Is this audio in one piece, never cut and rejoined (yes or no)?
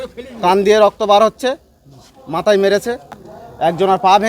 no